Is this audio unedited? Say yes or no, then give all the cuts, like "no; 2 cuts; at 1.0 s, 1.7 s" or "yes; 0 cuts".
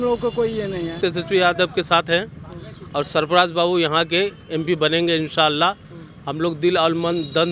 no; 1 cut; at 1.0 s